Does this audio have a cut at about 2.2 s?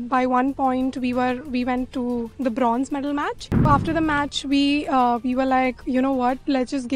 no; 1 cut; at 3.7 s

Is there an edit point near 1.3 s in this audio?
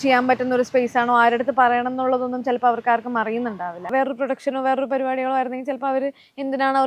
no; 1 cut; at 3.9 s

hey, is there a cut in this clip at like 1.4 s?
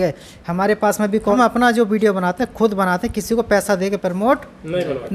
yes; 1 cut; at 1.4 s

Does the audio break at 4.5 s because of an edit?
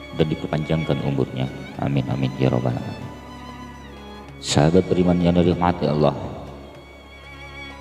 yes; 2 cuts; at 3.0 s, 4.5 s

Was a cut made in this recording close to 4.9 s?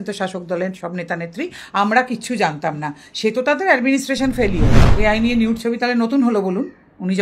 yes; 1 cut; at 4.9 s

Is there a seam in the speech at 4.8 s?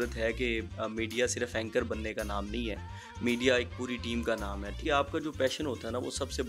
yes; 1 cut; at 4.8 s

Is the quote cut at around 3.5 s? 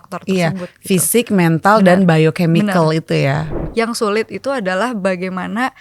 yes; 1 cut; at 3.5 s

